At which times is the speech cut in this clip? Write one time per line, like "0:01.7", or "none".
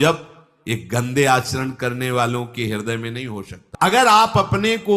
0:03.6